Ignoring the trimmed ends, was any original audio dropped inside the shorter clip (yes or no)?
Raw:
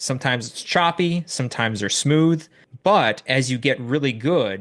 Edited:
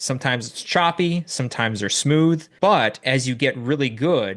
yes